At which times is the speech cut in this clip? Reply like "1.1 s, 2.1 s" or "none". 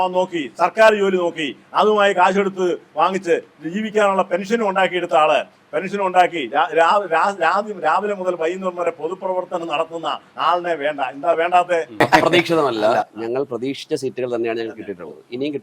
12.0 s